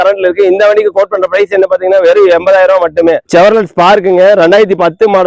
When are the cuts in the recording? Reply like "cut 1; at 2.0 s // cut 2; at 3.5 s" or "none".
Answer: cut 1; at 3.2 s

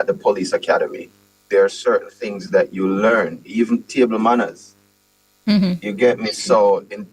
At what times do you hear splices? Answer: none

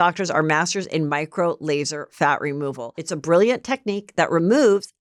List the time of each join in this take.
none

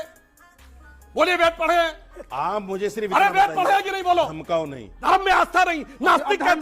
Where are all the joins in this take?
cut 1; at 4.9 s

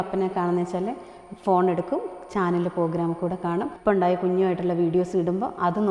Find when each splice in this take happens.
cut 1; at 3.8 s

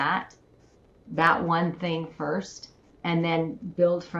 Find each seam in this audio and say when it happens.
none

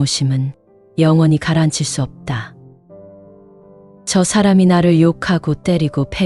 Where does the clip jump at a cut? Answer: cut 1; at 2.5 s // cut 2; at 4.1 s

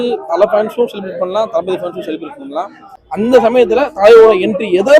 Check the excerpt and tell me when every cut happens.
cut 1; at 2.9 s

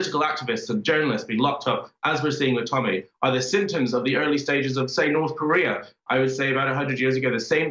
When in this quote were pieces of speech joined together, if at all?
none

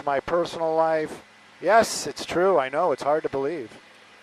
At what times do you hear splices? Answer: cut 1; at 1.1 s

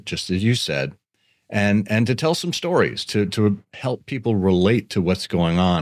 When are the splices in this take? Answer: none

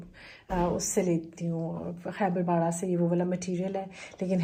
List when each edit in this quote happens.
none

